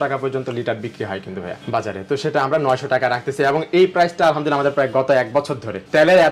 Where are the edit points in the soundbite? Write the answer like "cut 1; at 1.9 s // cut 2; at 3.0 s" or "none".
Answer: none